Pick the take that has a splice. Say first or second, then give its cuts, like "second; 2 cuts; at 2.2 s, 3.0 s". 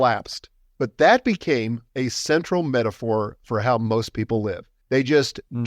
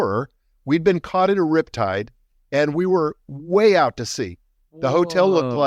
first; 2 cuts; at 1.8 s, 4.7 s